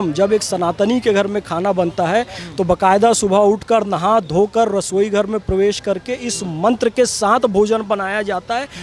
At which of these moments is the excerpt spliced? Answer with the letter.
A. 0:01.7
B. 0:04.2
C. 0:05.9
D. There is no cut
D